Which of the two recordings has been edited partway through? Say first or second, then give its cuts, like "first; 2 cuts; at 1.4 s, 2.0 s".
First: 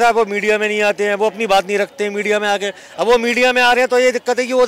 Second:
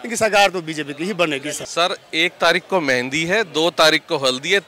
second; 1 cut; at 1.6 s